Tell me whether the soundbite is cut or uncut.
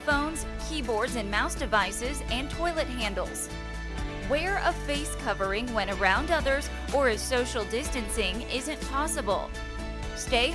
uncut